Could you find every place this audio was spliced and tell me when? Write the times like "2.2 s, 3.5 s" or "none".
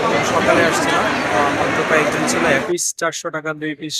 2.6 s